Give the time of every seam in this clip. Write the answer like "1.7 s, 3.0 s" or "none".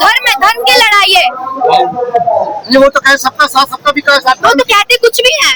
none